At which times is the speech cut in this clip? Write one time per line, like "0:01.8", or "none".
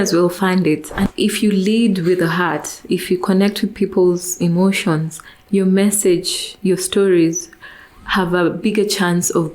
0:01.1